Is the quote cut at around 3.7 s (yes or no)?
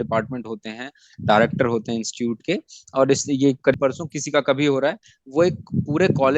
yes